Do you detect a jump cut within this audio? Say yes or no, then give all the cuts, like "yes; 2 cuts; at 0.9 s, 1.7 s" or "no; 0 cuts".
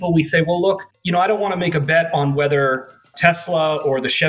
no; 0 cuts